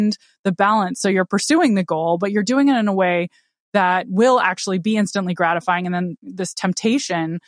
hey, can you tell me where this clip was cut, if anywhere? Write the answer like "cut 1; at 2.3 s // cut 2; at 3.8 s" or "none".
cut 1; at 6.2 s